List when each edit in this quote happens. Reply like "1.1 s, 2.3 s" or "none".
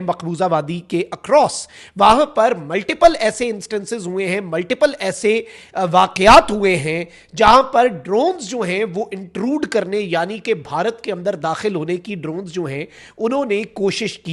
none